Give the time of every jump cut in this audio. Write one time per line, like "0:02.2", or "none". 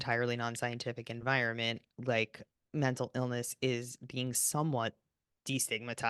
0:02.4